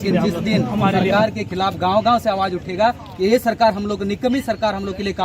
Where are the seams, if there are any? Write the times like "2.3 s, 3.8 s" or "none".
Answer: 1.1 s